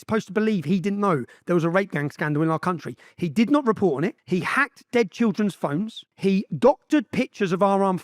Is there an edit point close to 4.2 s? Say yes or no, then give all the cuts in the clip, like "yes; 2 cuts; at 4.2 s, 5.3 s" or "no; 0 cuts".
yes; 2 cuts; at 4.2 s, 6.0 s